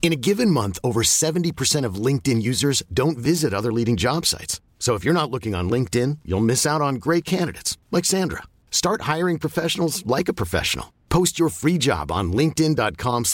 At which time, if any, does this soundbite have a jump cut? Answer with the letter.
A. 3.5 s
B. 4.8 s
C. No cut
C